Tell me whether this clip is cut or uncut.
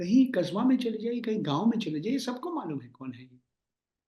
uncut